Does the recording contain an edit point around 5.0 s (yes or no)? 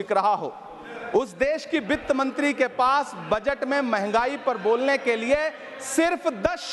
no